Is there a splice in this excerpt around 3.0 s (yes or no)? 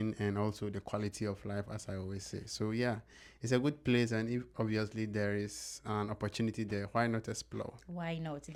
no